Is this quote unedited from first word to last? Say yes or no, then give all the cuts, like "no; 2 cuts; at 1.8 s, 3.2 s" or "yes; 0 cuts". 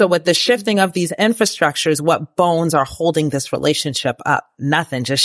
yes; 0 cuts